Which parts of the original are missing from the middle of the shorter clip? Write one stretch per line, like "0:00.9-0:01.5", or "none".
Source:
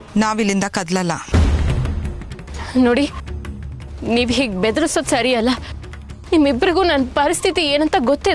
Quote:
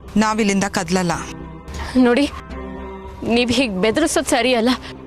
0:01.2-0:02.0